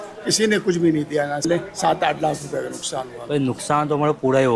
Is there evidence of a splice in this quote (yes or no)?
yes